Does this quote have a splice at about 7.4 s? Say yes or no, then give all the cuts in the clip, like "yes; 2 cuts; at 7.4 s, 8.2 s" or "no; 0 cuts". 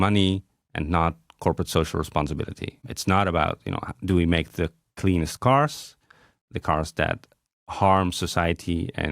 no; 1 cut; at 2.8 s